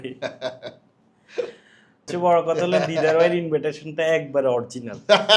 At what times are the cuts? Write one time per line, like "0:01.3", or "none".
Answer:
0:02.1